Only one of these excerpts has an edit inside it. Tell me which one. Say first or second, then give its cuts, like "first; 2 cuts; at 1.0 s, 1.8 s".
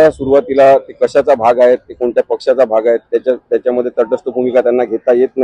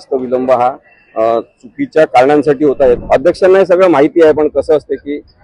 second; 1 cut; at 3.0 s